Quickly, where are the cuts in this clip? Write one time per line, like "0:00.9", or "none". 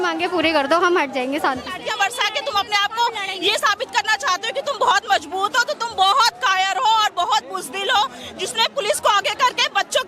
0:01.8